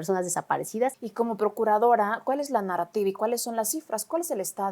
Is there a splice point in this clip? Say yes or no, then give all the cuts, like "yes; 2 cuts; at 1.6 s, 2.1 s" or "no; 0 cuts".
yes; 1 cut; at 1.0 s